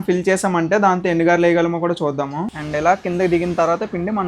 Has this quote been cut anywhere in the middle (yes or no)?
yes